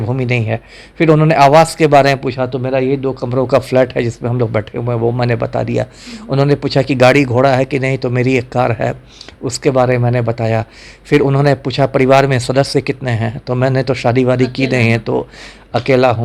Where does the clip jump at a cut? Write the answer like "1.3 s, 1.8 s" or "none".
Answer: none